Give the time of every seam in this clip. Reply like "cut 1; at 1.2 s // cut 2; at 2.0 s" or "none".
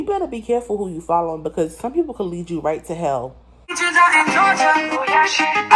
cut 1; at 3.2 s